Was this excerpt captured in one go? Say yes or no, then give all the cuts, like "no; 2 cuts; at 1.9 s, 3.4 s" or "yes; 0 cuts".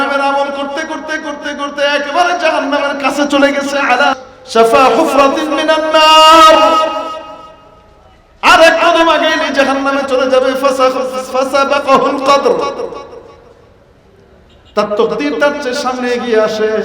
no; 1 cut; at 4.2 s